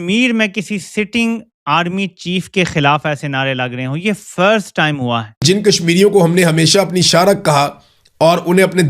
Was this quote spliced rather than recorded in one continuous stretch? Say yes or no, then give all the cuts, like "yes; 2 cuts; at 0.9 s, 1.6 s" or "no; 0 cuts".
yes; 1 cut; at 5.4 s